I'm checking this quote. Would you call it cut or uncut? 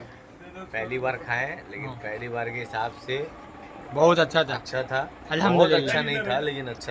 uncut